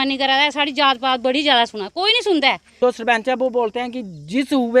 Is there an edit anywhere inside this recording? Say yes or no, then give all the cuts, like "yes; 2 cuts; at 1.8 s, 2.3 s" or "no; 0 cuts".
yes; 1 cut; at 2.7 s